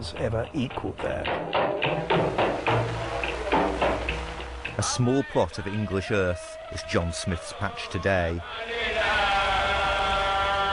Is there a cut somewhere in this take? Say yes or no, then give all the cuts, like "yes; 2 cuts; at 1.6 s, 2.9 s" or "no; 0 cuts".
yes; 1 cut; at 2.6 s